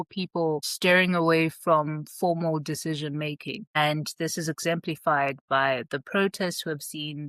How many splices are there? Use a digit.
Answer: 0